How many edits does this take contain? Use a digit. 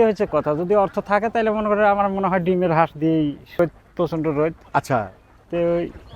1